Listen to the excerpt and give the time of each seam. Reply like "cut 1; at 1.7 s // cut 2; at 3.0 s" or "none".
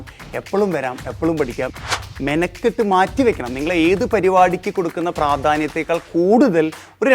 cut 1; at 1.7 s